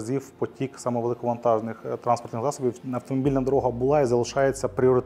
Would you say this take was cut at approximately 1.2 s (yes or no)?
no